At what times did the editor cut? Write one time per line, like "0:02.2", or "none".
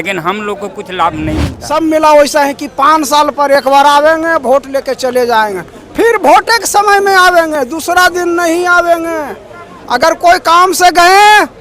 0:01.6